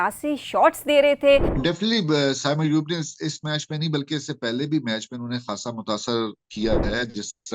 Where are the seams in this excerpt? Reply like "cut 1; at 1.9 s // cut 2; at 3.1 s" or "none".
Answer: cut 1; at 1.6 s